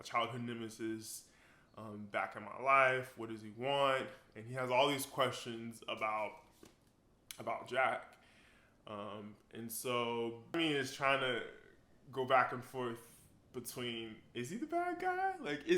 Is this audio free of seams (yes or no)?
no